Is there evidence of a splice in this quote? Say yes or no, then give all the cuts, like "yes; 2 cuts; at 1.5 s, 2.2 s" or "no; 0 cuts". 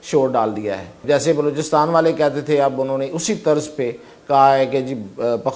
yes; 1 cut; at 1.0 s